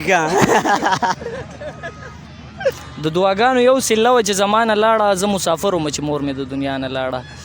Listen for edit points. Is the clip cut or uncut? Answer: cut